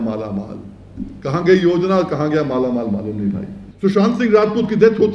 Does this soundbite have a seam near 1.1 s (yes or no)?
no